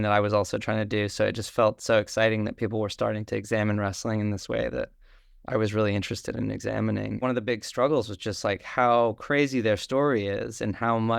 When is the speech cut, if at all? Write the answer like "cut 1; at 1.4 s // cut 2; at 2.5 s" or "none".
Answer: cut 1; at 7.2 s